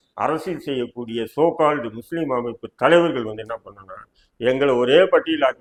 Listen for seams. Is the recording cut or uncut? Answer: uncut